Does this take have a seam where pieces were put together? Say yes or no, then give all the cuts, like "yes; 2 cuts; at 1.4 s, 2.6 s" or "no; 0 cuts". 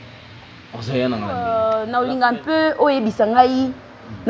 yes; 1 cut; at 1.4 s